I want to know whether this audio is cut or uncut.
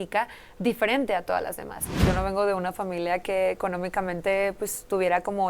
cut